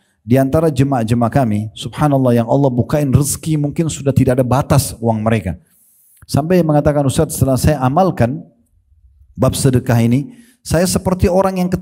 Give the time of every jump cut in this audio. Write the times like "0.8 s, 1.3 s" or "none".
none